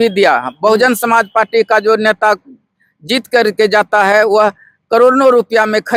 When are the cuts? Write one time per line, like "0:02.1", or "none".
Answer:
none